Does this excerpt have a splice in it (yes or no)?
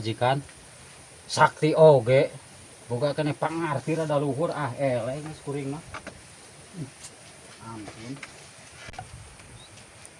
no